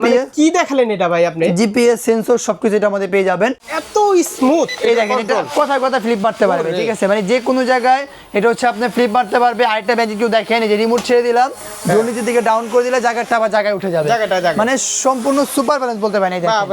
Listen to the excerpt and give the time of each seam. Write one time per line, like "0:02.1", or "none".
0:03.7